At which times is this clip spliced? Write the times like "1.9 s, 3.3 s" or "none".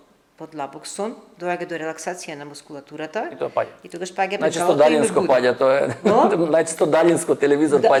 none